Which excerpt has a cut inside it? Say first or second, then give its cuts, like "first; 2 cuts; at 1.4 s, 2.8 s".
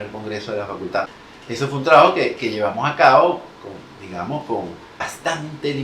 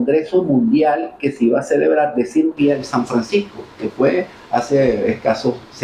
first; 2 cuts; at 1.1 s, 5.1 s